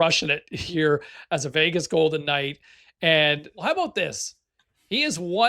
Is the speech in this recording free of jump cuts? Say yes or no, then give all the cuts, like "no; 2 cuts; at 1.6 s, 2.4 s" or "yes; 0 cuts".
no; 1 cut; at 3.6 s